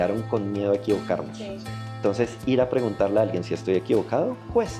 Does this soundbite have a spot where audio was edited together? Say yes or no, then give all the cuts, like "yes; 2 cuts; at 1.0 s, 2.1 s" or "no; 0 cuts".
no; 0 cuts